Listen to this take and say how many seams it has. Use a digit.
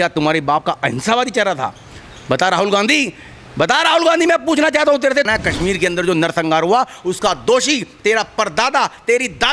1